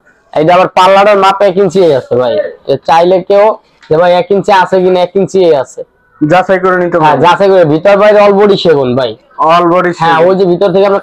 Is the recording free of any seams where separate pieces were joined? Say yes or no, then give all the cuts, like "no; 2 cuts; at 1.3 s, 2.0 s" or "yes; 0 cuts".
yes; 0 cuts